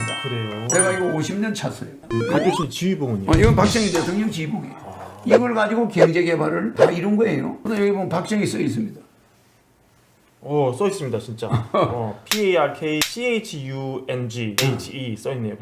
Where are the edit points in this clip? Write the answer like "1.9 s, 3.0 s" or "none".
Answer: 2.0 s, 7.6 s